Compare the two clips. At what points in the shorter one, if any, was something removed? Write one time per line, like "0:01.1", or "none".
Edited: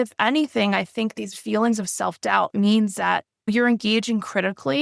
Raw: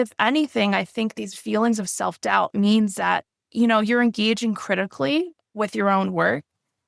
0:03.5